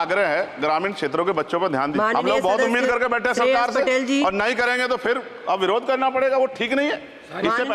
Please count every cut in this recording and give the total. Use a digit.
1